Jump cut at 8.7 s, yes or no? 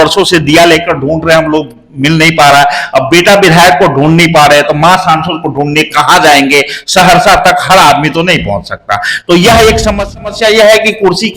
no